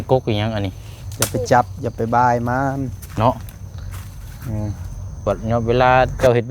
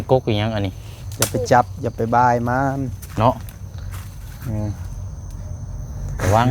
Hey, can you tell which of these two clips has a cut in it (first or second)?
first